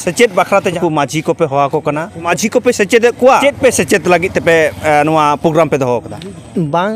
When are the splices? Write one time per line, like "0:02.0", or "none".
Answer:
0:00.8
0:02.3
0:03.4